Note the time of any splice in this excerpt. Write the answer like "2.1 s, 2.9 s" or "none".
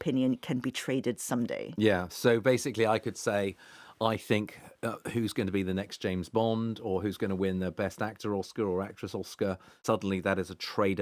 9.8 s